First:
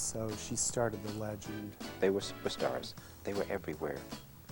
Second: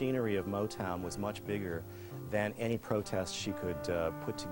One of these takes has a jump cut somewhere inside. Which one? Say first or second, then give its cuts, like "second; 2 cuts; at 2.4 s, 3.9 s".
first; 2 cuts; at 1.8 s, 3.1 s